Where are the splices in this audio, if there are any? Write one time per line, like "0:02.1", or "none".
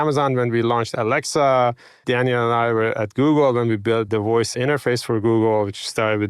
0:00.9
0:02.0
0:04.2